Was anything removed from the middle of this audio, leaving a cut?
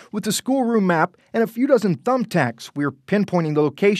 no; 0 cuts

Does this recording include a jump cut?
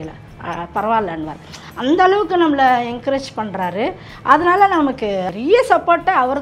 yes; 1 cut; at 5.3 s

